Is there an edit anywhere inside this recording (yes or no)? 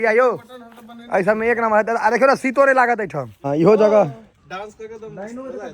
yes